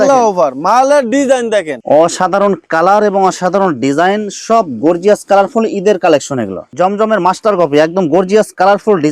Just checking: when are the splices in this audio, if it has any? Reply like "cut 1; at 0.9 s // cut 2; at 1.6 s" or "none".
cut 1; at 1.8 s // cut 2; at 6.7 s

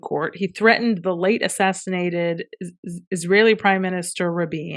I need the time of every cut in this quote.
none

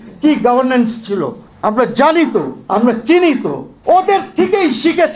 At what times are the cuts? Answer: cut 1; at 1.4 s // cut 2; at 2.6 s // cut 3; at 3.6 s

